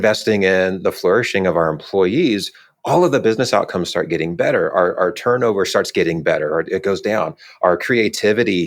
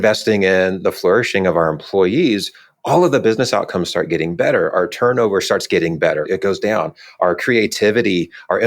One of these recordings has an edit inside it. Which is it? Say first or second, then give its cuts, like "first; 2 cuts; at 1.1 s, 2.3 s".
second; 2 cuts; at 4.7 s, 6.2 s